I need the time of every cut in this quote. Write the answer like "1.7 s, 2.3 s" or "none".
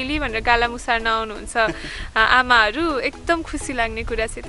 none